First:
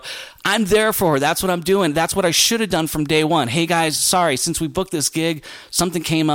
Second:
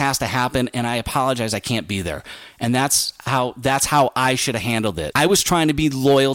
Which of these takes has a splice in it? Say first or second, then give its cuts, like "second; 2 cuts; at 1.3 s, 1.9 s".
second; 1 cut; at 5.0 s